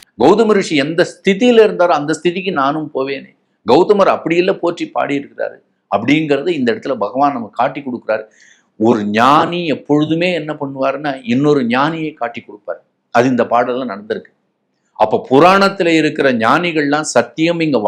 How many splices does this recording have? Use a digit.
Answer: 0